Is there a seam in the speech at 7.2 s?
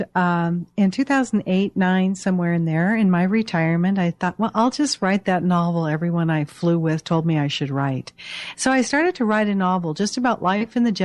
yes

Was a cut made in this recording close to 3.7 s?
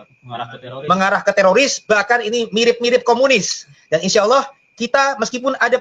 yes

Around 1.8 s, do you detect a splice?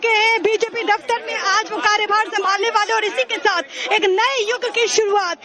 no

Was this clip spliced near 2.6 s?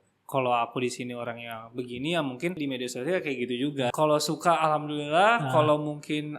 yes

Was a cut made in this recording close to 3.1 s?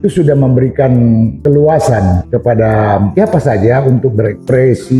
yes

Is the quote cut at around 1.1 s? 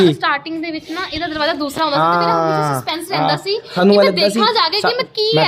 no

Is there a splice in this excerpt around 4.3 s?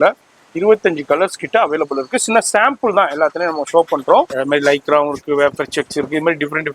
yes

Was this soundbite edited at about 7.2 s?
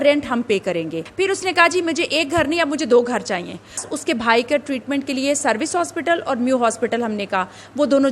no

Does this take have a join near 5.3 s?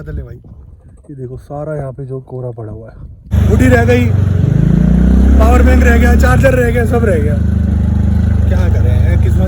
no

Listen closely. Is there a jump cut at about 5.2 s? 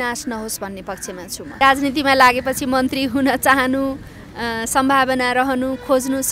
no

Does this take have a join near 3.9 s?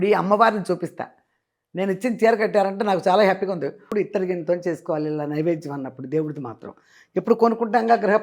yes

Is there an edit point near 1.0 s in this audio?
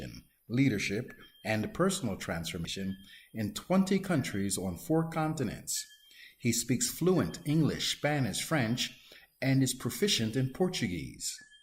no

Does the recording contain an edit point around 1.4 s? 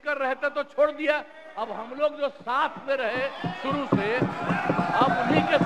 no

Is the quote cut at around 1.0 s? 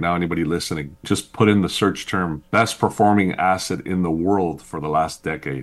yes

